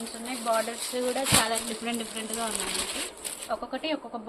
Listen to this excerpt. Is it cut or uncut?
uncut